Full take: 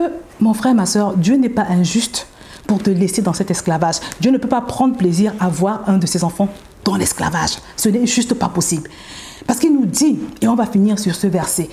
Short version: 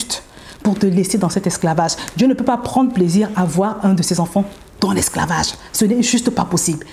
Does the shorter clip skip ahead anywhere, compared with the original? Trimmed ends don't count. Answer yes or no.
no